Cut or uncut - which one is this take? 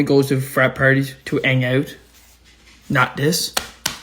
uncut